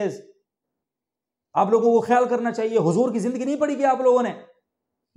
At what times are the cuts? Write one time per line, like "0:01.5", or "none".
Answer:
none

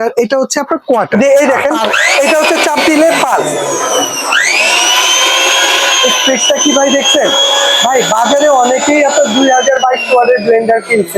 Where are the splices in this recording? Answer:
0:01.3

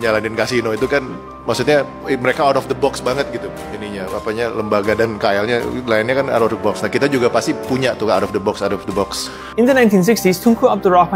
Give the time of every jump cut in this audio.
0:09.4

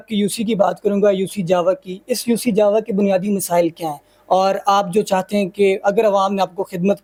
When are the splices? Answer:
none

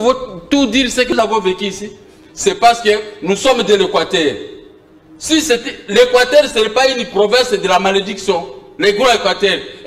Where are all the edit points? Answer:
0:01.1

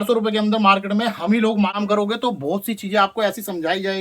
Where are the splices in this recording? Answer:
0:01.8

